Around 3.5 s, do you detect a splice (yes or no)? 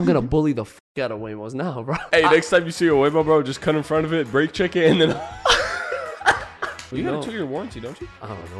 no